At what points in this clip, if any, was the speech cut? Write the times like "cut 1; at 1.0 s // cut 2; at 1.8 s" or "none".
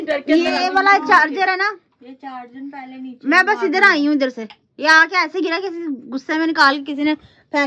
none